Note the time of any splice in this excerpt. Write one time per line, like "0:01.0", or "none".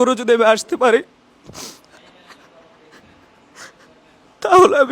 none